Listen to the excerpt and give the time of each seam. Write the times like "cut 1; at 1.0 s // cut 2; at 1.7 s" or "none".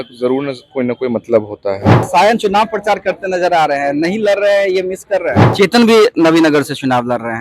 cut 1; at 1.9 s // cut 2; at 5.4 s